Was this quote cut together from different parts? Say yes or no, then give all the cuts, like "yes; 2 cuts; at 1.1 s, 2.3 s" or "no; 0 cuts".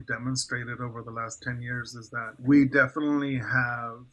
yes; 1 cut; at 2.3 s